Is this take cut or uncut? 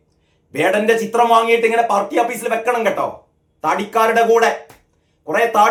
uncut